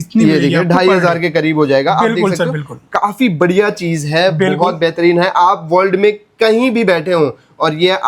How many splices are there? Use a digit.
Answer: 0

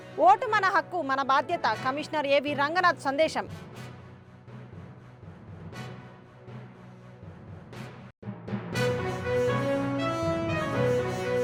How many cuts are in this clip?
0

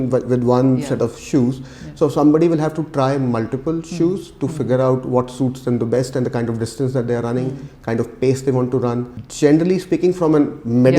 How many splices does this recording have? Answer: 1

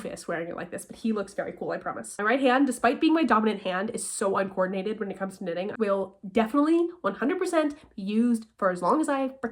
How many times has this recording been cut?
2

